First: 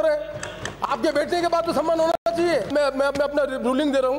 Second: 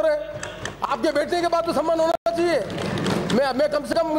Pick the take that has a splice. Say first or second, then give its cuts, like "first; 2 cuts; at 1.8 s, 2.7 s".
first; 1 cut; at 2.7 s